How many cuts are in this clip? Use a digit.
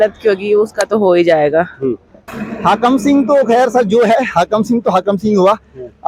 1